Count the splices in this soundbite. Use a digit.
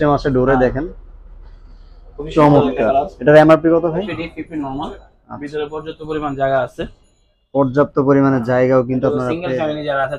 1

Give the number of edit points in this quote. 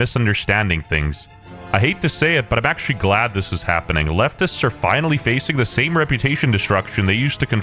2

